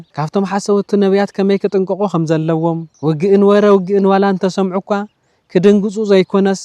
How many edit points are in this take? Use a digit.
0